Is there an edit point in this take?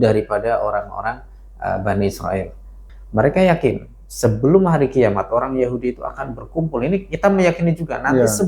yes; 1 cut; at 2.8 s

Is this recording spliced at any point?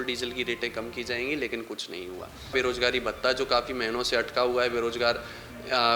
yes; 1 cut; at 2.5 s

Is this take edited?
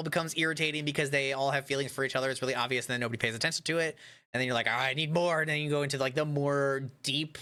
no; 0 cuts

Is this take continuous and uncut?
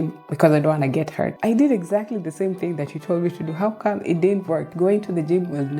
no; 2 cuts; at 1.4 s, 4.7 s

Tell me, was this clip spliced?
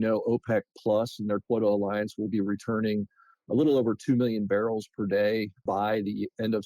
yes; 1 cut; at 5.6 s

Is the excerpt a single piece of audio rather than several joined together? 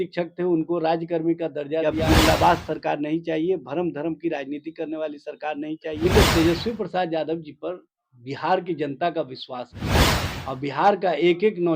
no; 2 cuts; at 1.9 s, 6.1 s

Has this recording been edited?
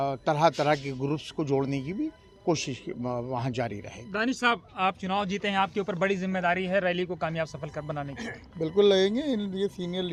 no; 0 cuts

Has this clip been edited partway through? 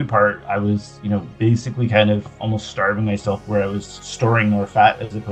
no; 0 cuts

